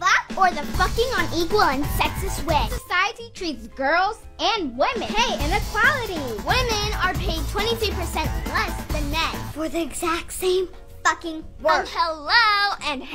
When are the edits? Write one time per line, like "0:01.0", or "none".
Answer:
0:09.1